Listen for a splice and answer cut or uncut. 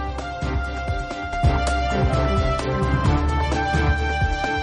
uncut